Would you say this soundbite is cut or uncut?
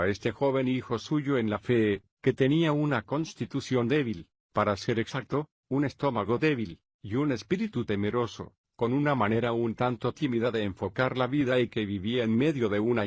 uncut